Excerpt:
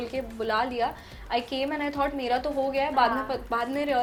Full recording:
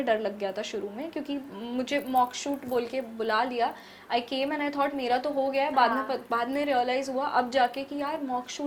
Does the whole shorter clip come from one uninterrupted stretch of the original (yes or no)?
yes